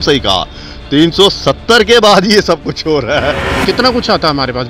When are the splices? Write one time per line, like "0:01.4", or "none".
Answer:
0:03.6